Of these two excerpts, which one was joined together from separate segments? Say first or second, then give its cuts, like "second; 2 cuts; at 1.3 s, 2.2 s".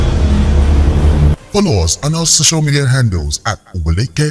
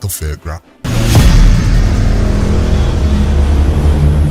first; 1 cut; at 1.2 s